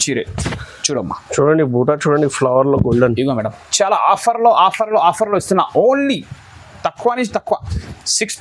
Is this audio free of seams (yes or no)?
yes